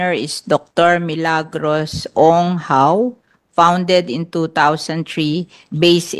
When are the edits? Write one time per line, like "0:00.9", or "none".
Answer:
none